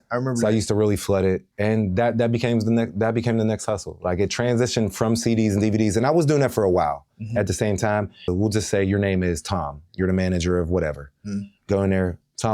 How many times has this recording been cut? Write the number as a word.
one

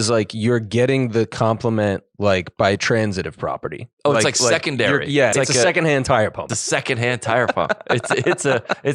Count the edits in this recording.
two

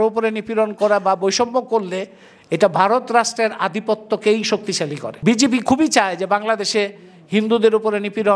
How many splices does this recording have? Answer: one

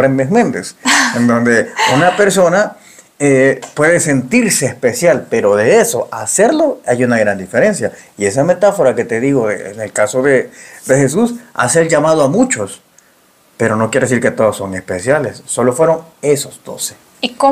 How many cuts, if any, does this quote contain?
zero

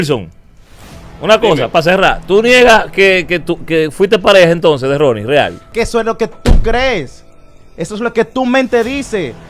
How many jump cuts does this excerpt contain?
one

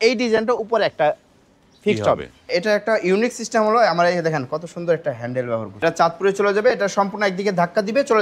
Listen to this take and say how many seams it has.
two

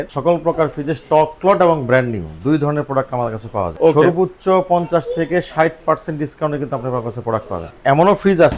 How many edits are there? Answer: one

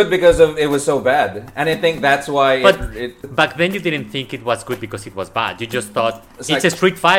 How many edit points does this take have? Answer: one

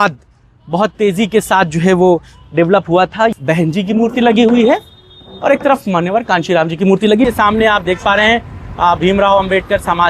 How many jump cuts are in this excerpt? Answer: two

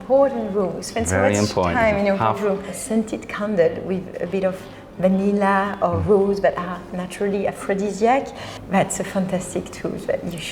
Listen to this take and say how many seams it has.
two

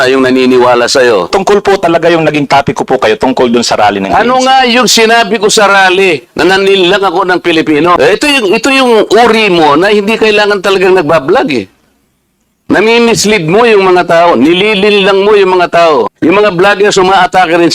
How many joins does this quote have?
three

